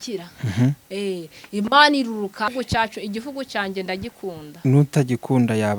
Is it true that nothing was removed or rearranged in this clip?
no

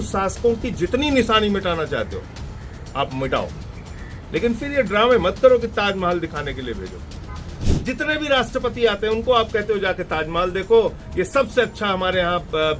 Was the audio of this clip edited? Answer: yes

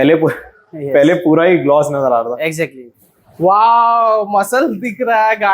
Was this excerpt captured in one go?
no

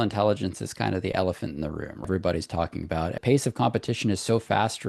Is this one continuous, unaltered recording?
no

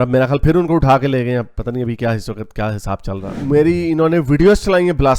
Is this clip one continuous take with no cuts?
no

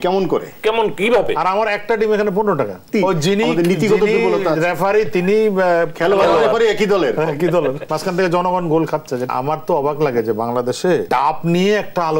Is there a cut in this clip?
yes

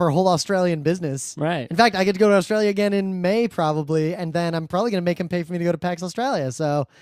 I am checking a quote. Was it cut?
yes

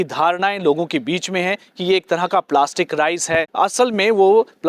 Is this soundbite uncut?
no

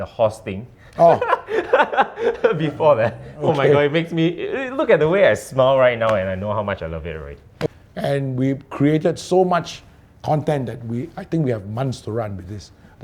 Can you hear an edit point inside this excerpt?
yes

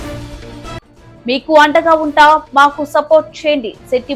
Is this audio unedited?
yes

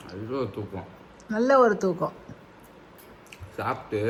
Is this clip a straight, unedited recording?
yes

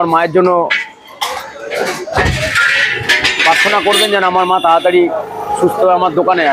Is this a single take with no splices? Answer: yes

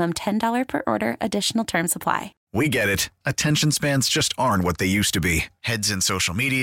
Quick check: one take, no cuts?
no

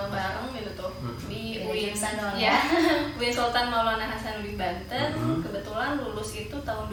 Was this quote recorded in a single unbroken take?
yes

